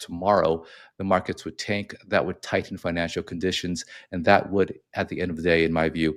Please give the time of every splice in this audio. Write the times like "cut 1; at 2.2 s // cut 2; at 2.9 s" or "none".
none